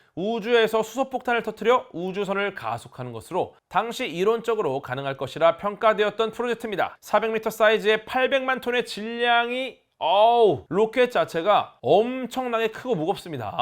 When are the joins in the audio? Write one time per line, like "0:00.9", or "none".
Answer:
0:07.0